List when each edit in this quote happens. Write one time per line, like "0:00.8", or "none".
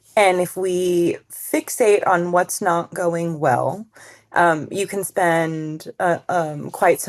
none